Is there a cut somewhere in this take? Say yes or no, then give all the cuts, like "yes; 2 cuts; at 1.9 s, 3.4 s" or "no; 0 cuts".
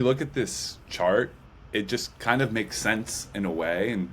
no; 0 cuts